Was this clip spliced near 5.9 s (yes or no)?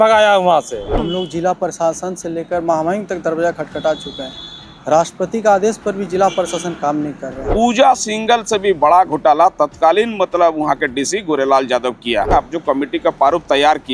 no